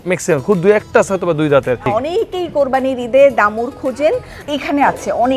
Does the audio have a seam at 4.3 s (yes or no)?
yes